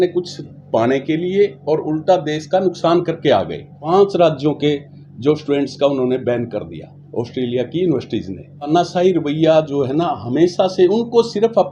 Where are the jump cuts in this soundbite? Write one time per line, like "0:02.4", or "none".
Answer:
0:03.7
0:08.7